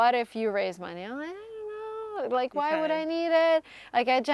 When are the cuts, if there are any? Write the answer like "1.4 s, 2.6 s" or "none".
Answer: none